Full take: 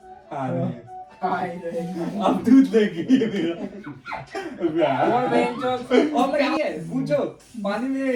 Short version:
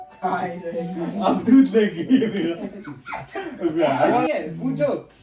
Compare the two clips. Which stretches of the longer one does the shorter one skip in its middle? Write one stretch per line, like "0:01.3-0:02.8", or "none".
0:05.3-0:06.6